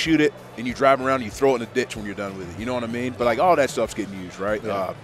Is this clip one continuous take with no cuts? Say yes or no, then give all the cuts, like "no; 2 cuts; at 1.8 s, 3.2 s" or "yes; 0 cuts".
yes; 0 cuts